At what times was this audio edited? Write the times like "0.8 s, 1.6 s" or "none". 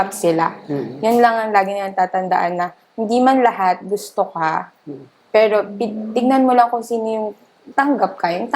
none